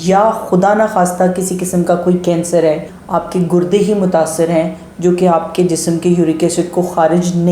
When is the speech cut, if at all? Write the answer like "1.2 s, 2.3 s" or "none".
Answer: 2.9 s